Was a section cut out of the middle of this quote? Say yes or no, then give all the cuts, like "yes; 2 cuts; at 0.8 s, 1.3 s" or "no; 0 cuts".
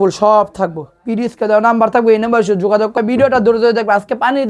yes; 1 cut; at 3.0 s